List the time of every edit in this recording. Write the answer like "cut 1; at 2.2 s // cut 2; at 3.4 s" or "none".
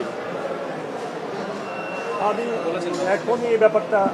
none

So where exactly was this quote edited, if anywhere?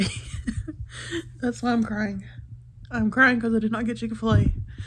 none

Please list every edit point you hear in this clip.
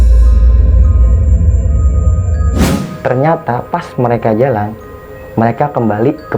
cut 1; at 2.7 s

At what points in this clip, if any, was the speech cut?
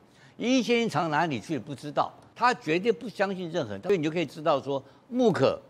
cut 1; at 2.2 s // cut 2; at 3.8 s

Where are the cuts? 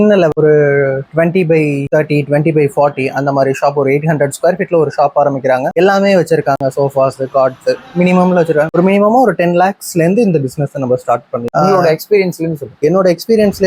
cut 1; at 1.8 s // cut 2; at 5.7 s // cut 3; at 8.7 s // cut 4; at 11.4 s

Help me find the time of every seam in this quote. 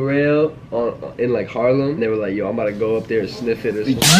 cut 1; at 2.0 s

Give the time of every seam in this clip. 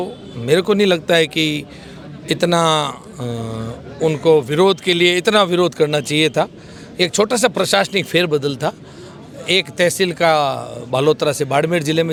none

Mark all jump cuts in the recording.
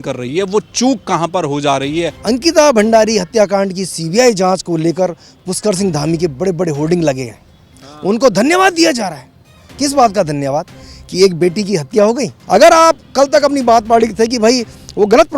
cut 1; at 2.2 s // cut 2; at 12.3 s

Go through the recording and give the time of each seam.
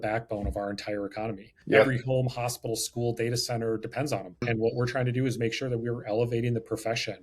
cut 1; at 1.5 s // cut 2; at 4.4 s

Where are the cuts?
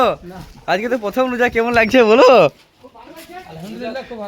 none

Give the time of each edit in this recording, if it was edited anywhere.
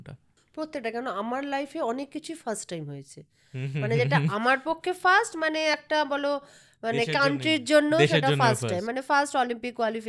none

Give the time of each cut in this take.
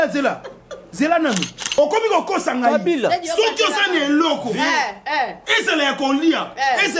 cut 1; at 1.6 s

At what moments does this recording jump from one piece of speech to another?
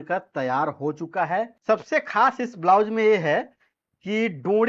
cut 1; at 1.6 s

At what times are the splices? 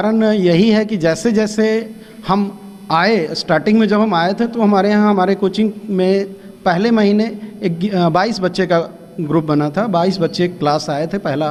none

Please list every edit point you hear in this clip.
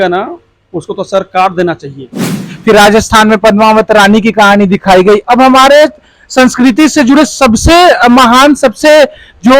cut 1; at 2.5 s

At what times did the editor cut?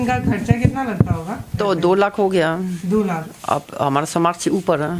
cut 1; at 1.5 s

